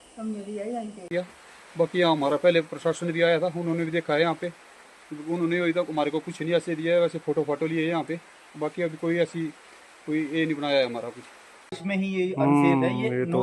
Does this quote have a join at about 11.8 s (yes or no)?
yes